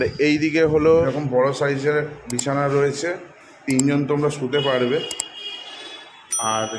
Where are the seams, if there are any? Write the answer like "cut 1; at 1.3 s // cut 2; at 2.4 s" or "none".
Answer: cut 1; at 1.1 s